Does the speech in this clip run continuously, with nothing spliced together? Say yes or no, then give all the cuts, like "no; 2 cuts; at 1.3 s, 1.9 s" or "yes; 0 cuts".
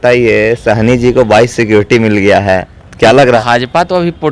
no; 1 cut; at 3.4 s